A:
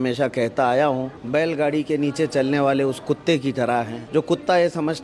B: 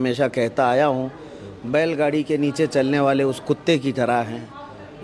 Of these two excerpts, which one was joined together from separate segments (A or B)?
A